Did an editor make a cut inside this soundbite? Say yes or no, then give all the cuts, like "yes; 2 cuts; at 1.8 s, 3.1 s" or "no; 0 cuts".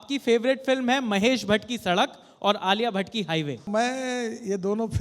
yes; 1 cut; at 3.7 s